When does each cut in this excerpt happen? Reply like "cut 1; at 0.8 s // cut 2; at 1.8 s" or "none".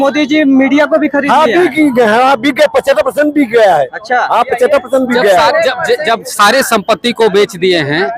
none